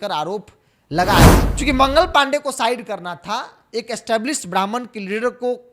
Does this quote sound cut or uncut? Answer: cut